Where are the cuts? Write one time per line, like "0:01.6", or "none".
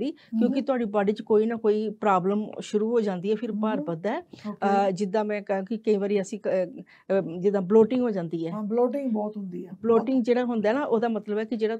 none